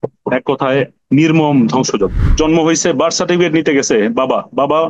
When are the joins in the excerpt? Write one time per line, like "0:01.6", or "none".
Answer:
0:01.0
0:02.3